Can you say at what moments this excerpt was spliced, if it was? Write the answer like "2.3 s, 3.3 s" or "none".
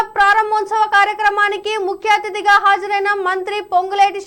none